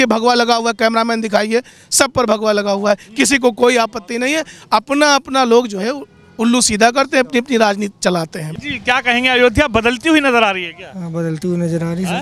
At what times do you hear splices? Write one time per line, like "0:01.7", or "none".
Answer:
none